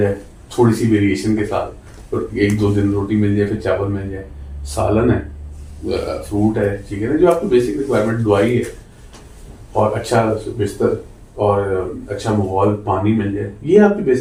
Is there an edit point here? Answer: no; 0 cuts

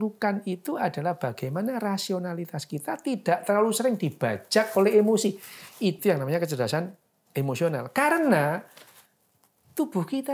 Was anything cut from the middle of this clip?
yes; 1 cut; at 6.0 s

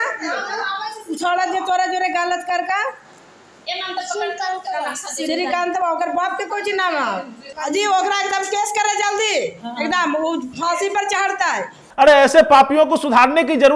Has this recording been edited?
yes; 2 cuts; at 7.4 s, 11.8 s

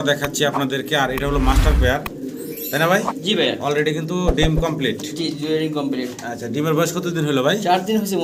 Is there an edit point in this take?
no; 0 cuts

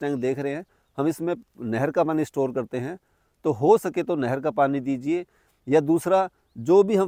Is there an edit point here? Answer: no; 0 cuts

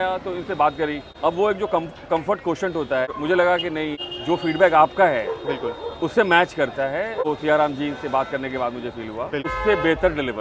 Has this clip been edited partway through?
yes; 5 cuts; at 1.1 s, 3.1 s, 4.0 s, 7.2 s, 9.5 s

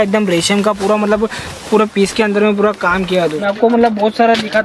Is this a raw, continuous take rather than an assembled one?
no; 1 cut; at 3.4 s

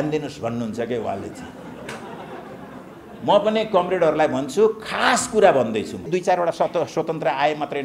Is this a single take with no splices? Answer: no; 1 cut; at 6.1 s

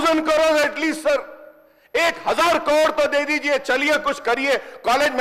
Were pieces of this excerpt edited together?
no; 0 cuts

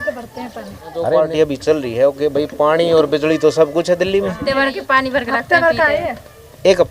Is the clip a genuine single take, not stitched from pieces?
no; 2 cuts; at 1.1 s, 4.4 s

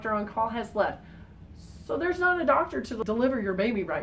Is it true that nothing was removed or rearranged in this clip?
no; 1 cut; at 2.9 s

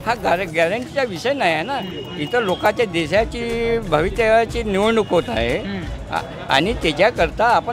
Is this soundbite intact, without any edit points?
yes; 0 cuts

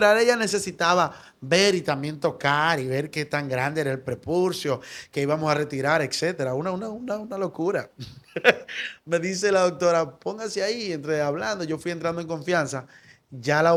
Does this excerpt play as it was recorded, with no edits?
yes; 0 cuts

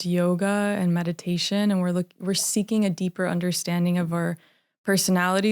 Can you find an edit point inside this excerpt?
no; 0 cuts

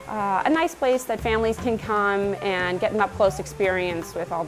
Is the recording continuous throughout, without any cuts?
yes; 0 cuts

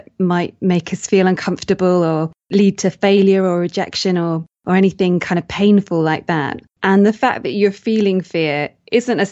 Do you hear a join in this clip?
yes; 1 cut; at 6.7 s

